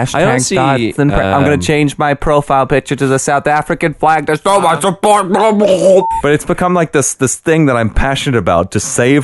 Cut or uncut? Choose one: cut